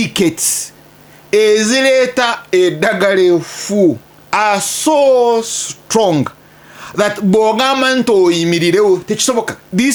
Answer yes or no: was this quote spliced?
no